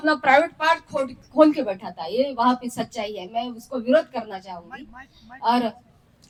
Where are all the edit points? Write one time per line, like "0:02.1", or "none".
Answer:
none